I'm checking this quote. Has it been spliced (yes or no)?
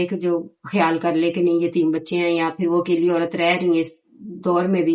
no